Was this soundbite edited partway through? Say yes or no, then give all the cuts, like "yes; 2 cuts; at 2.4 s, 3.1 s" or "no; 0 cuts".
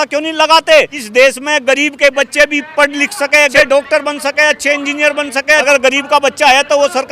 yes; 3 cuts; at 1.0 s, 3.5 s, 5.6 s